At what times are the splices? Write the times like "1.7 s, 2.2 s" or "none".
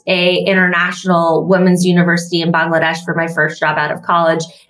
none